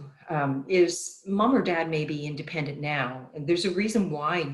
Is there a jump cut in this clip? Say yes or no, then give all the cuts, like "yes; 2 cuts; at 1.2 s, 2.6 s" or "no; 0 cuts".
no; 0 cuts